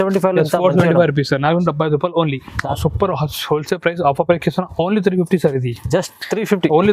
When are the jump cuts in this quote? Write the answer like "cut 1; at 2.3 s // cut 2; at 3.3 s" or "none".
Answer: cut 1; at 2.7 s